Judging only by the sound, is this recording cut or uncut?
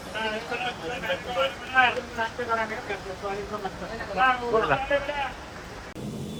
uncut